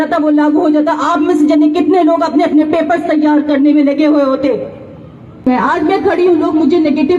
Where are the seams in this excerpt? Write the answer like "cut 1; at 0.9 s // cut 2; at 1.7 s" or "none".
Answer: cut 1; at 5.5 s